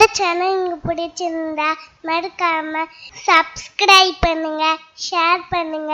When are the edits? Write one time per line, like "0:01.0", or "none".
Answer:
none